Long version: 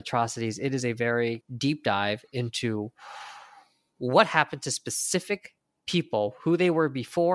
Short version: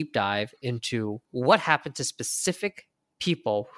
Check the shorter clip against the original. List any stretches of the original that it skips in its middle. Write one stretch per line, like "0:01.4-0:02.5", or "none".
0:02.9-0:03.9